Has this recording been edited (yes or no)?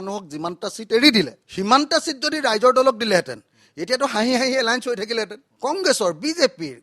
yes